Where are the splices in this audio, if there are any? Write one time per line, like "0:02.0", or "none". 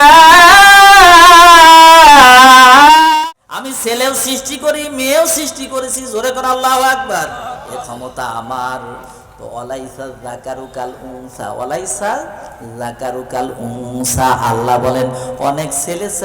0:03.1